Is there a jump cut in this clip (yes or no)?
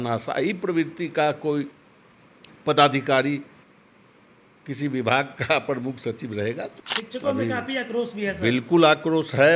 yes